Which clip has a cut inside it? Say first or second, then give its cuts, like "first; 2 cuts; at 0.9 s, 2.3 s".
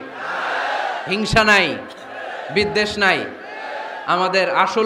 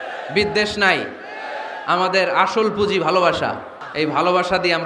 second; 1 cut; at 3.8 s